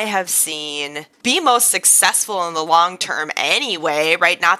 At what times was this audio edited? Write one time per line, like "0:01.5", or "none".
0:01.1